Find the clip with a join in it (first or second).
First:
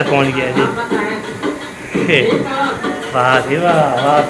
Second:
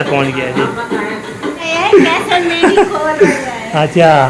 second